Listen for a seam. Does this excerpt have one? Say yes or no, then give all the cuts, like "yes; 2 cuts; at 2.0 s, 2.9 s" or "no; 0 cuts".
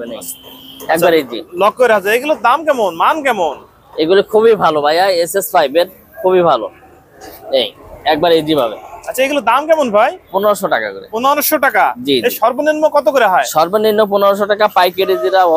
no; 0 cuts